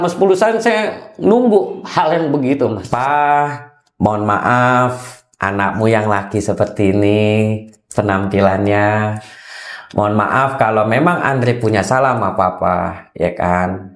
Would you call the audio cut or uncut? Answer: cut